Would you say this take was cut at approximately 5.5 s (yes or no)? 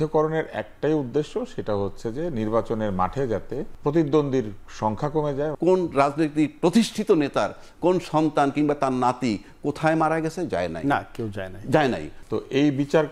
yes